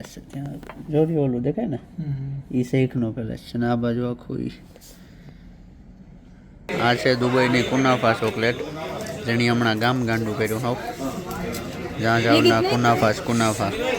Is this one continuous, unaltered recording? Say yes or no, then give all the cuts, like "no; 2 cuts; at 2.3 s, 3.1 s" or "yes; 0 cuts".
no; 1 cut; at 6.7 s